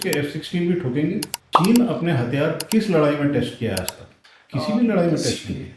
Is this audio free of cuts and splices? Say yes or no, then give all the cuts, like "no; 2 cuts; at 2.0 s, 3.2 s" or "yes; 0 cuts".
no; 1 cut; at 1.4 s